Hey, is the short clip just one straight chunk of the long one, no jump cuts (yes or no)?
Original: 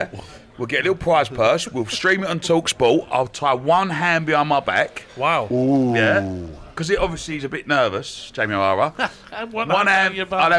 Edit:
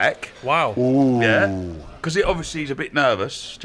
yes